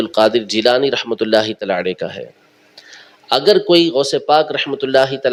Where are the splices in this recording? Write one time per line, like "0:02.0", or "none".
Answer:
none